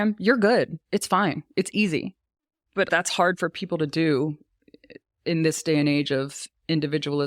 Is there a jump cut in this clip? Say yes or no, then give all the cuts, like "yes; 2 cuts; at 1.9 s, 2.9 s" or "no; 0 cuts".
yes; 1 cut; at 2.7 s